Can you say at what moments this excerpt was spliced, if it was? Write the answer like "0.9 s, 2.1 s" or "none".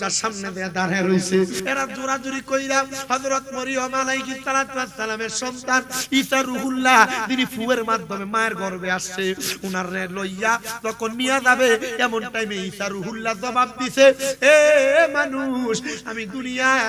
1.6 s